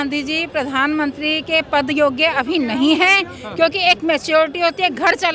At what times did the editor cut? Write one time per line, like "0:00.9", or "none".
none